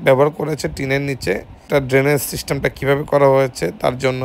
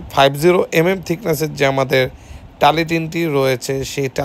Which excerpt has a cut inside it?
first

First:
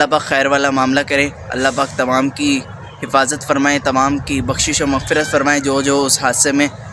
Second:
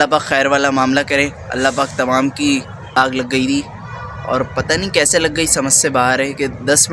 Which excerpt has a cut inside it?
second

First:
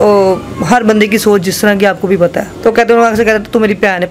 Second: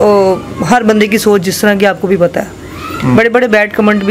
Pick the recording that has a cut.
first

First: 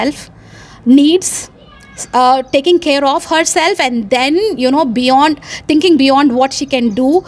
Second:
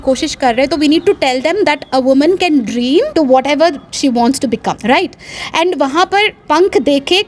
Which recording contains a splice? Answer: second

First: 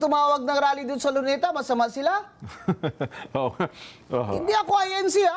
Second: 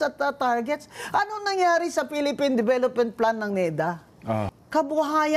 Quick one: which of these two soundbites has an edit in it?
second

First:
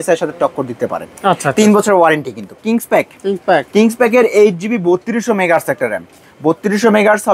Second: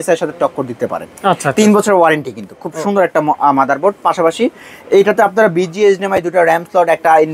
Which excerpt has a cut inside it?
first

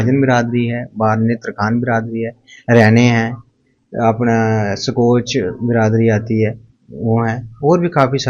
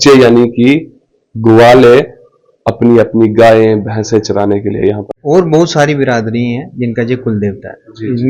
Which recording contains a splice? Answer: second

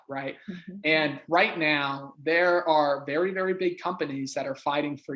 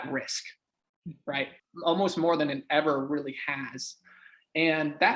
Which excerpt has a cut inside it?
second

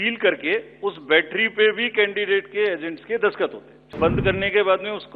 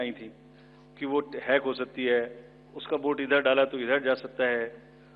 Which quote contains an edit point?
first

